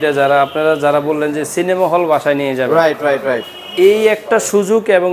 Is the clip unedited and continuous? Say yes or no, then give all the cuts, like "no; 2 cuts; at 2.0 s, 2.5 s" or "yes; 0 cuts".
yes; 0 cuts